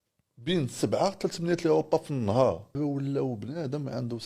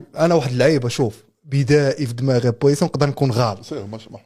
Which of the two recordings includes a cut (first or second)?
first